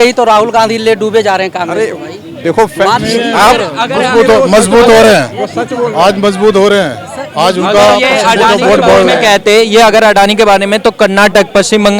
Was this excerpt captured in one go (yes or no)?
yes